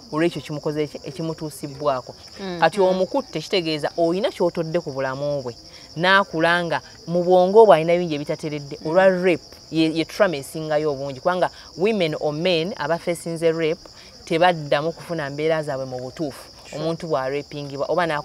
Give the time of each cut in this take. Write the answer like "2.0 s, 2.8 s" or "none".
2.2 s